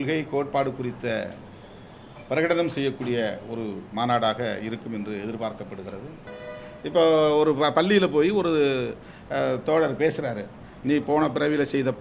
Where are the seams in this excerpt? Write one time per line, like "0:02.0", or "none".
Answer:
0:06.3